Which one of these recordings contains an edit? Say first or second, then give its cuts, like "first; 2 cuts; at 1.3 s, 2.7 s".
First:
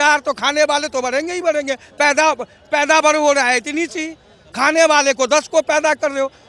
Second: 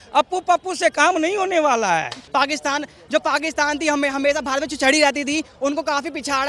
second; 1 cut; at 2.2 s